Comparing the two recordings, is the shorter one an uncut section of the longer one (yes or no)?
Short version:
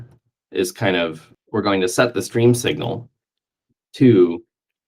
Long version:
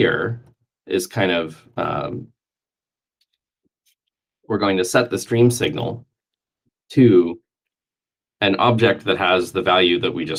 no